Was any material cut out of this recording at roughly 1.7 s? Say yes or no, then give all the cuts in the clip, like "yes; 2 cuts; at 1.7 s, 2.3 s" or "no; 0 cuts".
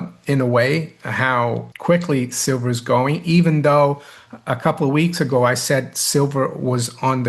yes; 1 cut; at 1.7 s